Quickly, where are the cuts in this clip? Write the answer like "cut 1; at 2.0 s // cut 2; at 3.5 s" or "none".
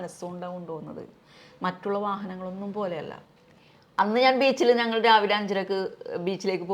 cut 1; at 3.2 s